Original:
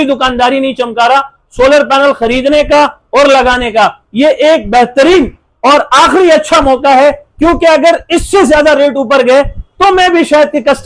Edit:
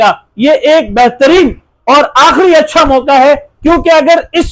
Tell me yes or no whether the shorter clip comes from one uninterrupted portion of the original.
yes